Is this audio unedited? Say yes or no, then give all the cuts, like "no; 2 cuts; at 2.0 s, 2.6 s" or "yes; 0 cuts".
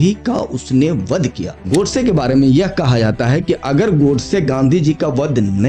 yes; 0 cuts